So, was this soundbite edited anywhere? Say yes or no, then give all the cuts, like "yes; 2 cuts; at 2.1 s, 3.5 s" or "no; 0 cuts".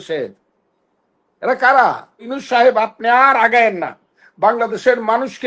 yes; 1 cut; at 2.4 s